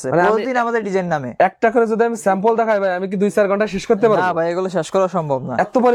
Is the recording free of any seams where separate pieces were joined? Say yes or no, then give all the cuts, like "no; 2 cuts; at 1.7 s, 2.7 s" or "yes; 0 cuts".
yes; 0 cuts